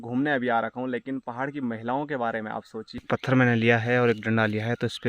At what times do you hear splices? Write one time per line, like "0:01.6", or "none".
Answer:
0:03.0